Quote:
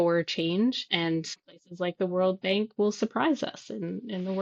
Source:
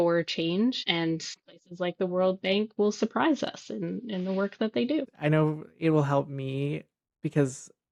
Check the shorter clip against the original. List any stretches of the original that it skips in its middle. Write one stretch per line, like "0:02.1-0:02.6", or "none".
none

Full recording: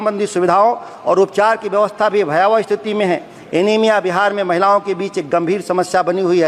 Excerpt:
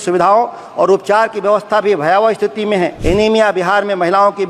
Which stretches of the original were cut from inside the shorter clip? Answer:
0:03.3-0:03.5

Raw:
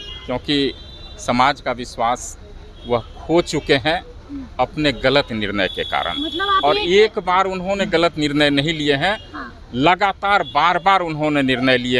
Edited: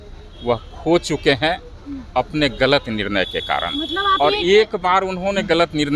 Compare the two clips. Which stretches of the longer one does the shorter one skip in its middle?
none

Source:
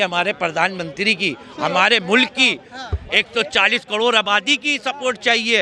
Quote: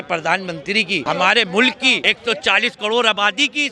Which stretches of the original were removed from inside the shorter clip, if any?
0:01.3-0:01.5
0:02.6-0:03.1

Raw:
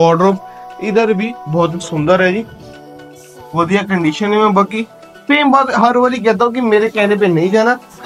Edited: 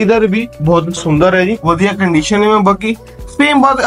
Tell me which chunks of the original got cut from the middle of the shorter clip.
0:02.5-0:03.5

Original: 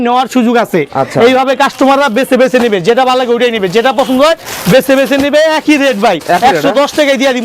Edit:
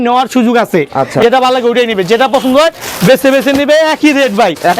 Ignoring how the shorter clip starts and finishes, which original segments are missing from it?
0:01.2-0:02.8

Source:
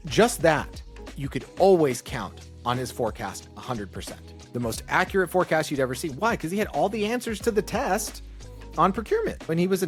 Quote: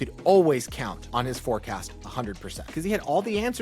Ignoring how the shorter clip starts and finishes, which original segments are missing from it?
0:02.3-0:02.5
0:04.3-0:06.4

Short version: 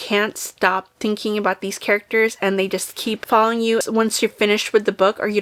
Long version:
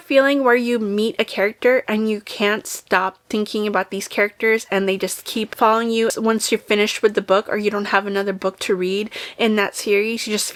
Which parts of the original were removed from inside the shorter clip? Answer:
none

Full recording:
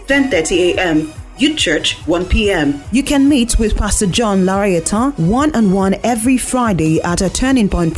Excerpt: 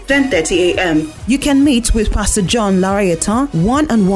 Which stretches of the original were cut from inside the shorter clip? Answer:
0:01.2-0:02.8

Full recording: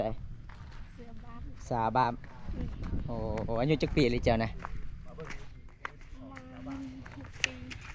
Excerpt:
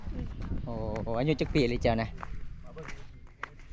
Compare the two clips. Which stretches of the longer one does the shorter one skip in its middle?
none

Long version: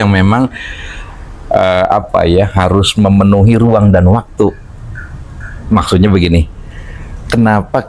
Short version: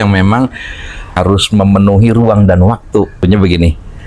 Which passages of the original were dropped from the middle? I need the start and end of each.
0:01.1-0:02.6
0:04.7-0:05.9

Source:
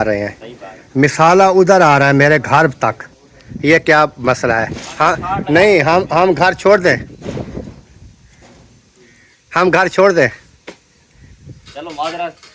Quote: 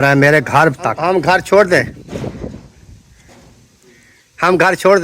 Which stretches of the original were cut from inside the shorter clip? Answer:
0:03.0-0:06.1

